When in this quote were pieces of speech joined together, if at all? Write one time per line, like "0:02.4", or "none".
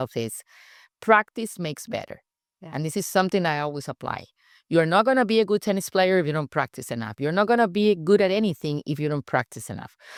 none